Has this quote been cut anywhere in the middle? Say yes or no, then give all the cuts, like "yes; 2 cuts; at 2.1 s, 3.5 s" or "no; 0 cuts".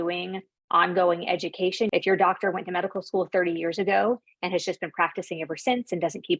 yes; 1 cut; at 1.9 s